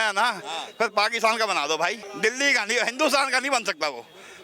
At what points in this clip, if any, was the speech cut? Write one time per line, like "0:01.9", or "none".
0:02.0